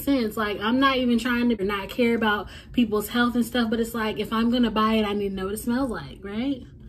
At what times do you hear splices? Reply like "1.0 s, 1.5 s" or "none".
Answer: 1.6 s

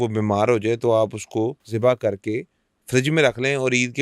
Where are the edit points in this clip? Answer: 1.6 s

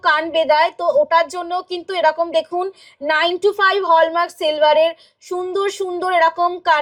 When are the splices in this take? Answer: none

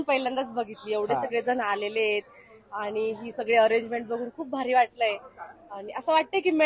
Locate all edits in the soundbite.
none

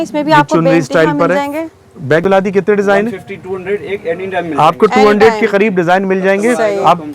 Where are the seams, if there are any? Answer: 2.2 s

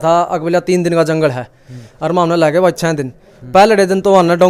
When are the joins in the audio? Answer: none

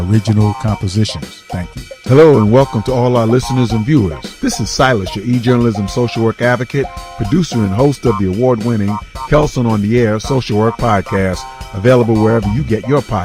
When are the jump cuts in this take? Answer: 2.0 s

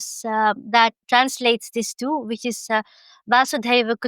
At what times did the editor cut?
1.0 s

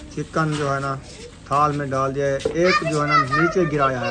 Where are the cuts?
none

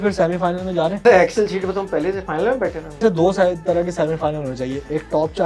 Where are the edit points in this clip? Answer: 1.0 s, 3.0 s

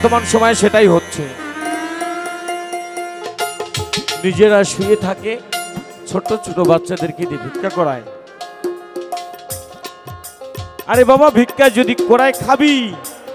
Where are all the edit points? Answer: 3.2 s

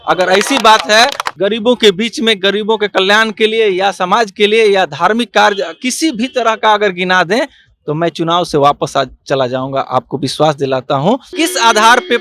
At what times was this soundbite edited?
1.2 s, 11.3 s

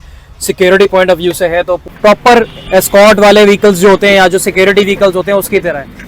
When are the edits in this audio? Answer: 1.9 s

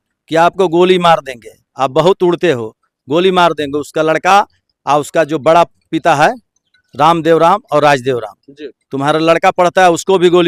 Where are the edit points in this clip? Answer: none

